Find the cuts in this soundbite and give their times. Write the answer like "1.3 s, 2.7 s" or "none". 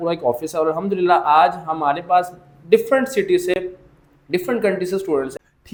none

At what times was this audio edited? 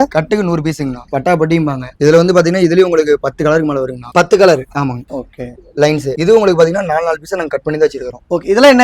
1.0 s

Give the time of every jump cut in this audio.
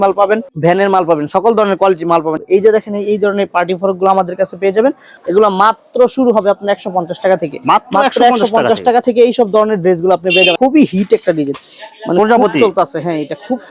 2.3 s, 5.1 s, 10.5 s

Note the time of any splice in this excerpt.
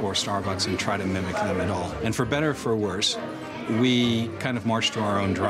1.9 s

